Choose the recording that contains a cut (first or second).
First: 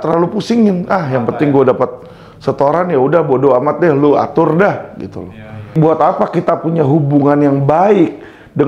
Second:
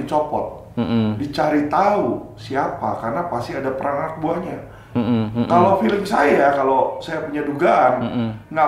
first